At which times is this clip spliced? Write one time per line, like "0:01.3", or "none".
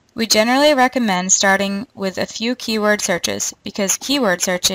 0:01.9